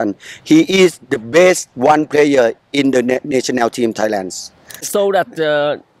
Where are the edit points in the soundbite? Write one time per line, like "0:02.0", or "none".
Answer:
0:04.9